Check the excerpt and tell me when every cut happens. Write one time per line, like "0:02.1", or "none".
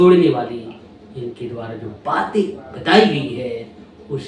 none

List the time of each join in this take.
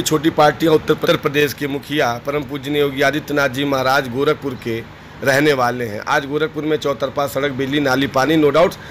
0:01.0

